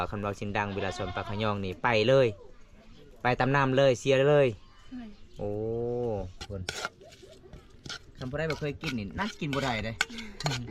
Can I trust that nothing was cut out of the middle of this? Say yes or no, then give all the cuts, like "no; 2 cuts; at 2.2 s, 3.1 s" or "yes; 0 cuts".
no; 1 cut; at 6.4 s